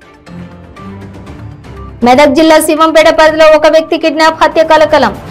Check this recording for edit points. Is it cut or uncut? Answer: cut